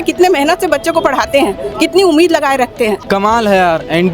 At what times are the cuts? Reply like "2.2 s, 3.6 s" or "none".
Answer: 3.0 s